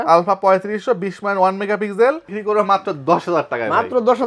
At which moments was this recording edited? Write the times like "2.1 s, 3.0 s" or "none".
2.3 s